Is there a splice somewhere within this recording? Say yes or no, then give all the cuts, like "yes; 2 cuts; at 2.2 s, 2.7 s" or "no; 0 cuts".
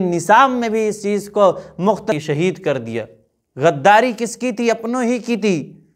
yes; 1 cut; at 2.2 s